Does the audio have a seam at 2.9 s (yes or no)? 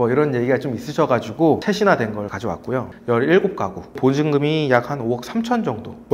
yes